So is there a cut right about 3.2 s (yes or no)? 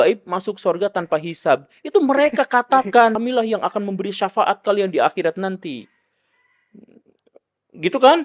yes